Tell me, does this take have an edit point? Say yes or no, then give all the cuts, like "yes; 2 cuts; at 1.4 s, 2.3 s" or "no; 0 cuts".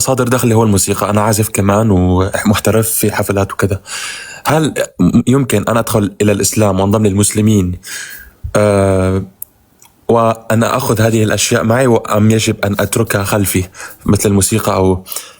no; 0 cuts